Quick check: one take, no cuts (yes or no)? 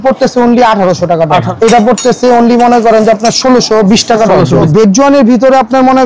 no